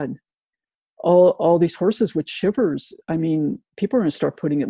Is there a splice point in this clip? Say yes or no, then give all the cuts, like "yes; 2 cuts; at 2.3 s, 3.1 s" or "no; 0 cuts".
yes; 1 cut; at 3.7 s